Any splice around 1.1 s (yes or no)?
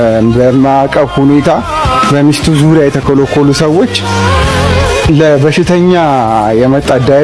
no